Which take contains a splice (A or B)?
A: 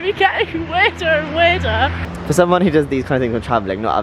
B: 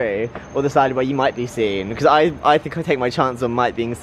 A